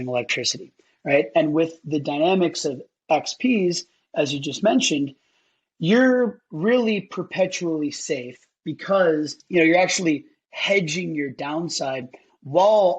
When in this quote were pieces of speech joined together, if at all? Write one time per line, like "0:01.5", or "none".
0:09.4